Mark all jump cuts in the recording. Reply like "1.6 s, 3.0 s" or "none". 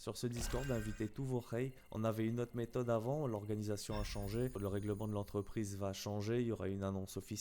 1.8 s